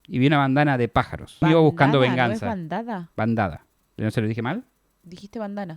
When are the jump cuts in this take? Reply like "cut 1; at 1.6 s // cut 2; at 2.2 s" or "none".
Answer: cut 1; at 1.4 s

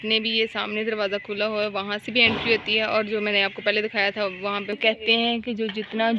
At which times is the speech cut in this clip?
cut 1; at 4.7 s

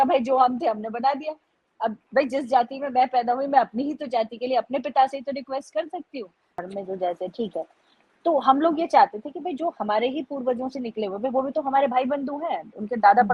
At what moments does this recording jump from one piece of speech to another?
cut 1; at 6.6 s

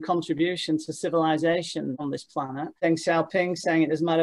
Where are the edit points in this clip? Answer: cut 1; at 2.7 s

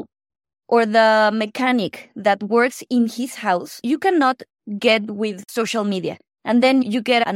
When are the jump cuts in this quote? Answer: cut 1; at 3.7 s // cut 2; at 5.4 s

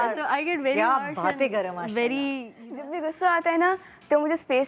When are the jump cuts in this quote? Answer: cut 1; at 2.9 s

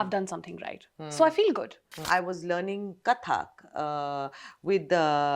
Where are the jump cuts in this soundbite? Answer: cut 1; at 2.0 s

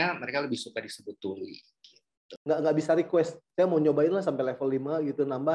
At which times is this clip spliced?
cut 1; at 2.3 s

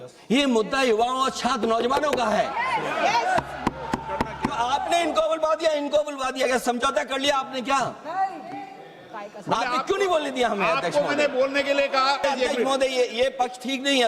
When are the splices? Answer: cut 1; at 12.2 s

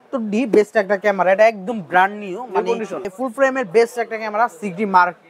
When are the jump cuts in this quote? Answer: cut 1; at 3.1 s

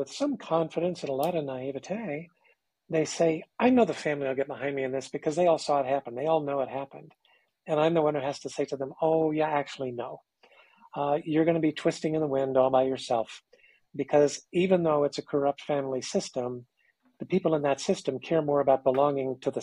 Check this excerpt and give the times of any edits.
none

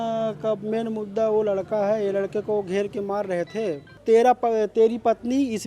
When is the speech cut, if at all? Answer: cut 1; at 3.9 s

